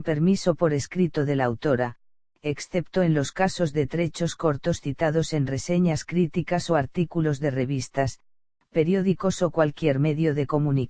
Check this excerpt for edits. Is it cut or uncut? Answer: cut